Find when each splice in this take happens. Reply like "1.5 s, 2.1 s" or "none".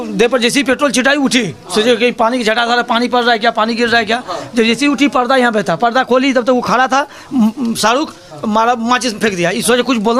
none